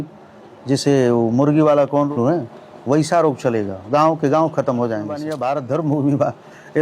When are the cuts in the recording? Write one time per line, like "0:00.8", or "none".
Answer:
0:02.1
0:05.3